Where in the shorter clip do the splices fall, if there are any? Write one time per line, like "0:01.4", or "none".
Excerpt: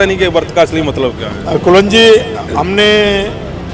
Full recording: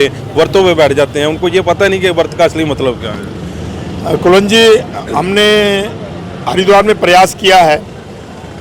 0:01.3